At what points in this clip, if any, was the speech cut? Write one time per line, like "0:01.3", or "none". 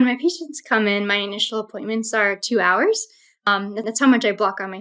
none